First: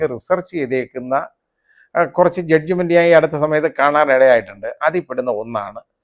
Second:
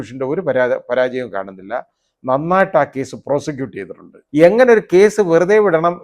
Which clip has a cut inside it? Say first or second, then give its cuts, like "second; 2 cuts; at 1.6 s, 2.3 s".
second; 1 cut; at 4.1 s